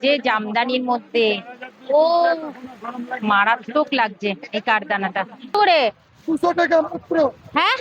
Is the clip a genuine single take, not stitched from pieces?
no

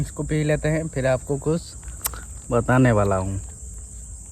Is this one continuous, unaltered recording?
yes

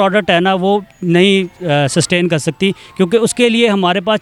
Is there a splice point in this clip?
no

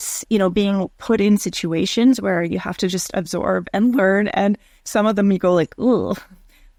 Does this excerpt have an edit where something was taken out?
no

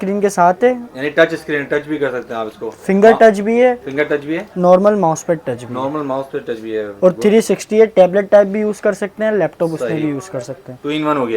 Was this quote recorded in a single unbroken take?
yes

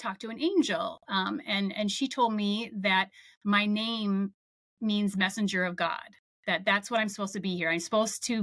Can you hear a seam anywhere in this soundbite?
no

